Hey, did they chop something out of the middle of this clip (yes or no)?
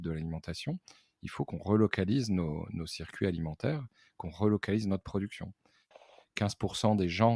yes